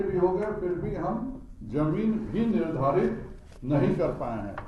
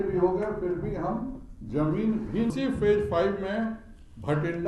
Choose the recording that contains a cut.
second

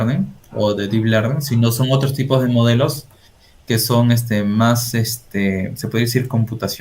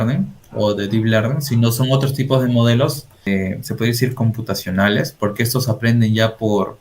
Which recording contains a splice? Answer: second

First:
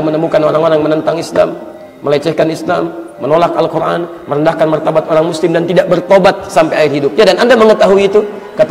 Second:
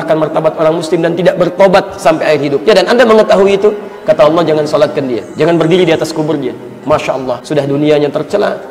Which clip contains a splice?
second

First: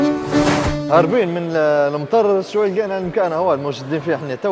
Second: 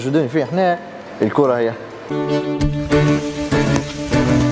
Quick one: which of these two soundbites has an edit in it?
second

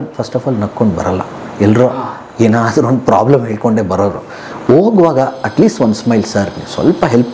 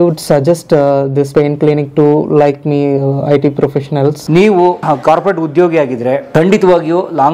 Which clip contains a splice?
second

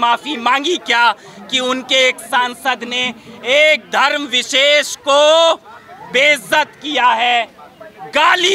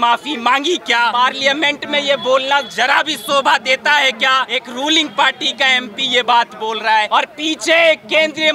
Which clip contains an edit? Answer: second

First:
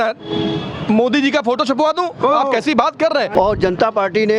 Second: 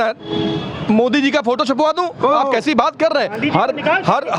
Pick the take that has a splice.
first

